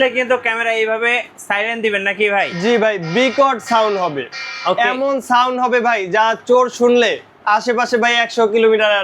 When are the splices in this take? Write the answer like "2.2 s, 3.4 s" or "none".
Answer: none